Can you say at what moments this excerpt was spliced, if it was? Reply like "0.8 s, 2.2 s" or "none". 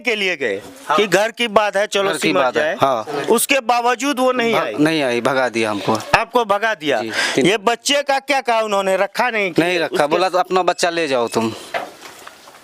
none